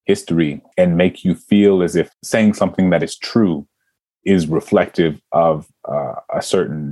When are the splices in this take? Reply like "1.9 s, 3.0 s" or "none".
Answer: none